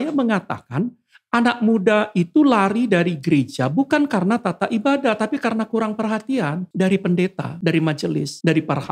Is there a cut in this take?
yes; 2 cuts; at 6.6 s, 7.9 s

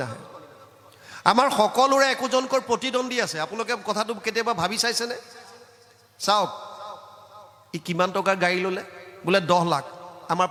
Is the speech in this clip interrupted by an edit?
no; 0 cuts

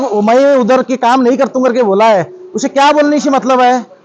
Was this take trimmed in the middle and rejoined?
no; 0 cuts

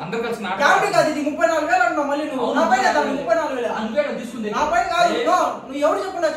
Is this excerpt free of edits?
yes; 0 cuts

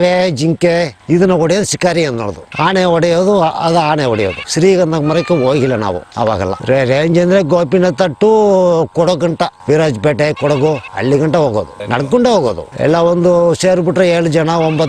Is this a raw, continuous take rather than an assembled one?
yes; 0 cuts

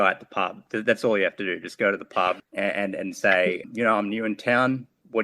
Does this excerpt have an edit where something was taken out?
yes; 2 cuts; at 2.4 s, 3.6 s

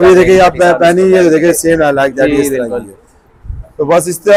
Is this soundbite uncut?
yes; 0 cuts

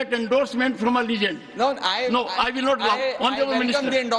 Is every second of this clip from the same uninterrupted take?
yes; 0 cuts

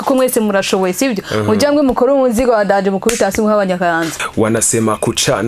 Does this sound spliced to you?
yes; 1 cut; at 4.2 s

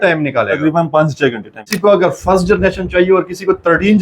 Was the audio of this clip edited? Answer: yes; 1 cut; at 1.7 s

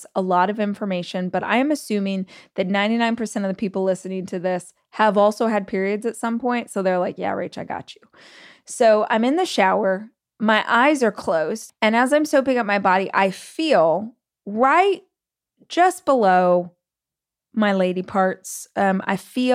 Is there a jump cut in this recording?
yes; 2 cuts; at 10.1 s, 11.6 s

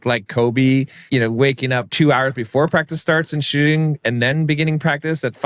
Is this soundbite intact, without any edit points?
no; 2 cuts; at 1.0 s, 1.9 s

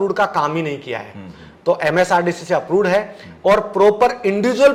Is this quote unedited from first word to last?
yes; 0 cuts

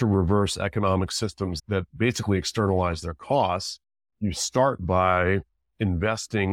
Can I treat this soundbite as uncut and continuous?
no; 1 cut; at 1.6 s

